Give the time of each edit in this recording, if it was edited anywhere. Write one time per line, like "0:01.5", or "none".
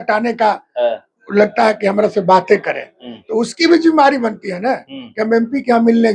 none